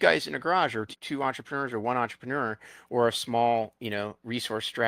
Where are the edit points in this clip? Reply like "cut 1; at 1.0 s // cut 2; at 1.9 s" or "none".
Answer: cut 1; at 0.9 s